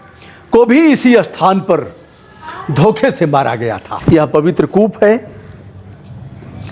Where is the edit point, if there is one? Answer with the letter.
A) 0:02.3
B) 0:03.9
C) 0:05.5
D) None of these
B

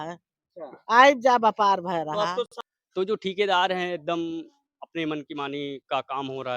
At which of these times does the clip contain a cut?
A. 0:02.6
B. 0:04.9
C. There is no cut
A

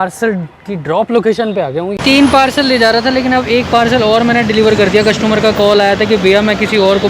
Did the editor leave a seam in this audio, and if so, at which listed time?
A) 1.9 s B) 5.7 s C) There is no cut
A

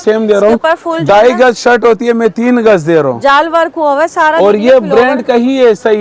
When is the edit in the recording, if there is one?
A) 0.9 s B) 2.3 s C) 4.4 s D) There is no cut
D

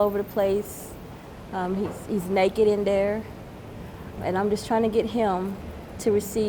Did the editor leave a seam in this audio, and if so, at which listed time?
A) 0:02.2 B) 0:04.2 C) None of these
B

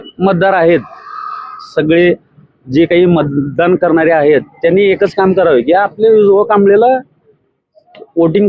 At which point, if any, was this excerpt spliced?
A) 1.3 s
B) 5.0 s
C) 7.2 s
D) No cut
D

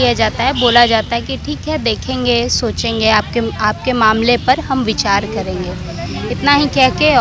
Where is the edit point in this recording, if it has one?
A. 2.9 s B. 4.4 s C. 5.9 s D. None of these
D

